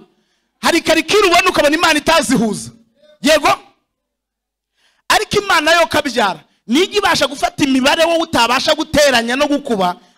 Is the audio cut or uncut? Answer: uncut